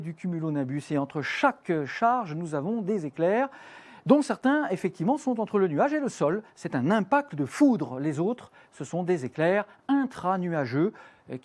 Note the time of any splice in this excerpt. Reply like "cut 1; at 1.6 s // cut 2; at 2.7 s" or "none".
none